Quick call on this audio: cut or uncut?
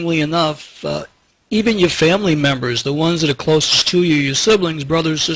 uncut